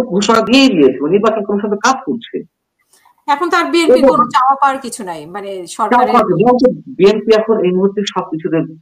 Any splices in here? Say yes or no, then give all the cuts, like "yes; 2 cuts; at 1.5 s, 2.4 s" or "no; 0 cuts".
no; 0 cuts